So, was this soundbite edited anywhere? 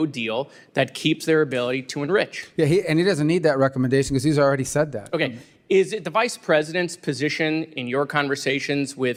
no; 0 cuts

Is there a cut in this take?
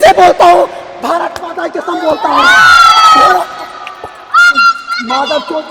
no; 0 cuts

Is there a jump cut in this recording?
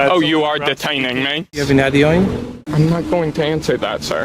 yes; 2 cuts; at 1.6 s, 2.7 s

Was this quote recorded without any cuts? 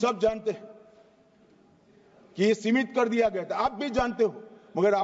yes; 0 cuts

